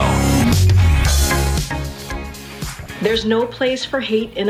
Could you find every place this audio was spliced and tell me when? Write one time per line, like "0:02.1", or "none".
0:02.8